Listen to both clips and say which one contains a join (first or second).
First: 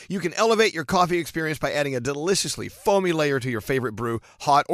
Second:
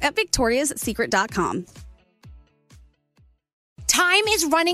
second